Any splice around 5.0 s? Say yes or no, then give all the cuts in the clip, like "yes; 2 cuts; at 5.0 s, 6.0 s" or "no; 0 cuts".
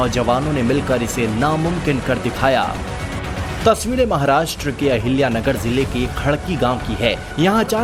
no; 0 cuts